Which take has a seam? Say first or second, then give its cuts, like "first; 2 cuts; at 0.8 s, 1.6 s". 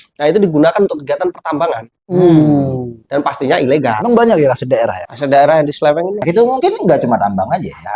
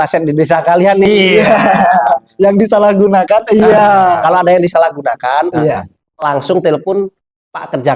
first; 2 cuts; at 4.0 s, 5.1 s